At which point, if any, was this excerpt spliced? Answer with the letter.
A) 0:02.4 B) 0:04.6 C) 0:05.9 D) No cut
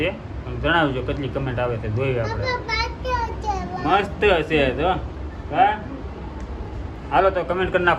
D